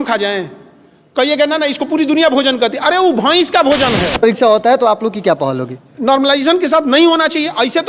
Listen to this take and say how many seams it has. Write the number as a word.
one